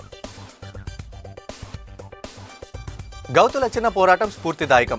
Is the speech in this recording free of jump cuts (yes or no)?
no